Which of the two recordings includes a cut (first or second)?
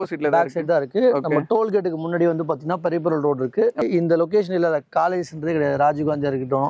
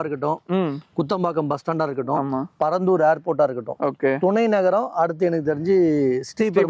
first